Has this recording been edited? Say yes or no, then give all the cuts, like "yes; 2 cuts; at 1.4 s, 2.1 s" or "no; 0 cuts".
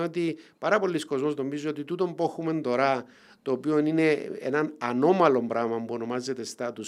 no; 0 cuts